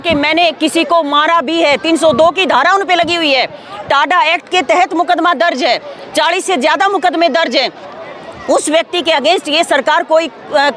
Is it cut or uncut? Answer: uncut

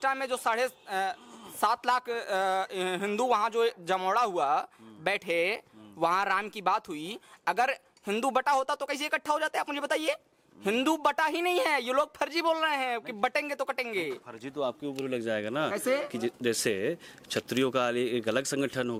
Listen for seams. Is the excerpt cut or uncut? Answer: uncut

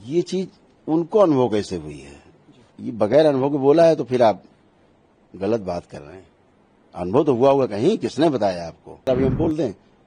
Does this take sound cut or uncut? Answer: cut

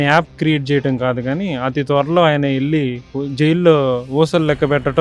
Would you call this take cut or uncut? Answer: uncut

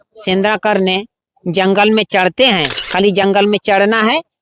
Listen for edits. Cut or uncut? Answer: cut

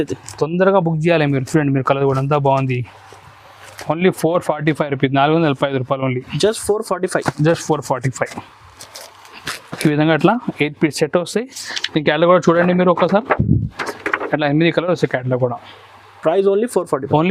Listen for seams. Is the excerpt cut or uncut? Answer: uncut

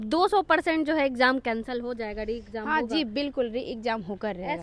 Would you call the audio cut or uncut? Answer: uncut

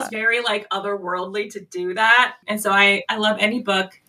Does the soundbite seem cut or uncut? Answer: uncut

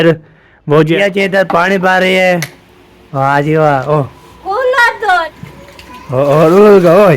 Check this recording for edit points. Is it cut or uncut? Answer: cut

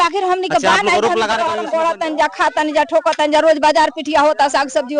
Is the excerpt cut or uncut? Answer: cut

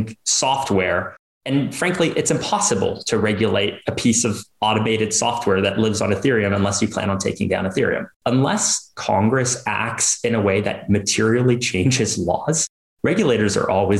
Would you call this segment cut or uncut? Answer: cut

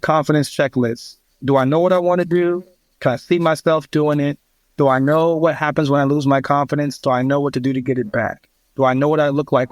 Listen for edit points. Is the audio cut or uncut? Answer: uncut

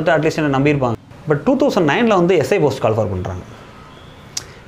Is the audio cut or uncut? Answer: cut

